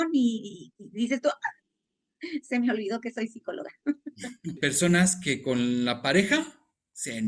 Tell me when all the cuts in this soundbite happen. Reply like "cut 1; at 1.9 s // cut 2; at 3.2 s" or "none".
cut 1; at 4.6 s